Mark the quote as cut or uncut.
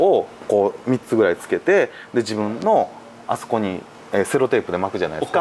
uncut